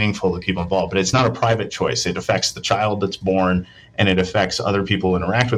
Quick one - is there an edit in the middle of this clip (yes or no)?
yes